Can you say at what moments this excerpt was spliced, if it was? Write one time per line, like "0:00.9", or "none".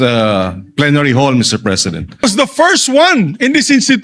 0:02.2